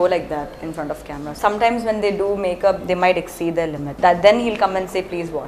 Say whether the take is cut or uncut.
cut